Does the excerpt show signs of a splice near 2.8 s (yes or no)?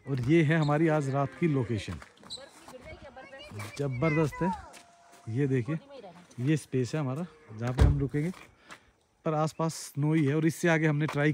no